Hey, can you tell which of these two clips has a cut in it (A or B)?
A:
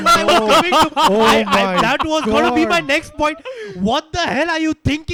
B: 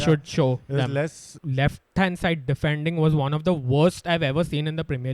B